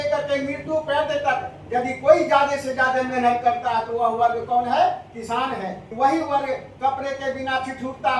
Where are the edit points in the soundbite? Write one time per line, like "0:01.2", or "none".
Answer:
0:05.8